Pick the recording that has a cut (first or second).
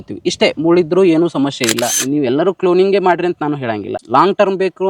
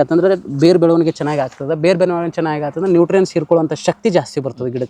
first